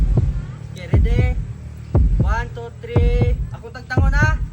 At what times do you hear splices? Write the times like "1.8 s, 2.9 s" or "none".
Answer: none